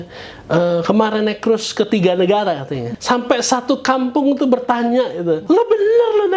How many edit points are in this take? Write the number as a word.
two